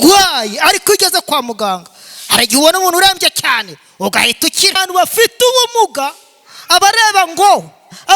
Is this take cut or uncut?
cut